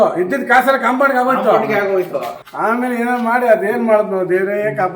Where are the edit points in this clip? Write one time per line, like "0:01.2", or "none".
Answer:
0:02.4